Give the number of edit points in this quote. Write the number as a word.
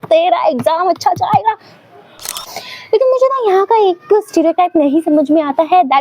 one